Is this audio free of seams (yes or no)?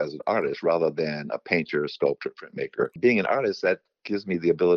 no